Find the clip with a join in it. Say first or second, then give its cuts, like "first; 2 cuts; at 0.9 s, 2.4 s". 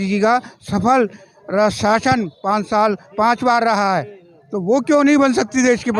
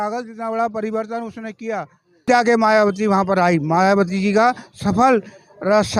second; 1 cut; at 2.2 s